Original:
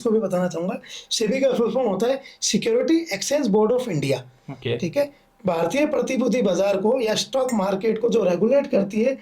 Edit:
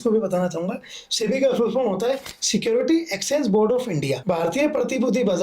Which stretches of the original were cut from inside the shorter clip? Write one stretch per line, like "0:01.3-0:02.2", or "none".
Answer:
0:04.2-0:05.4